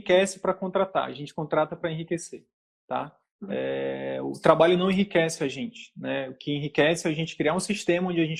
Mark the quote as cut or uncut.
uncut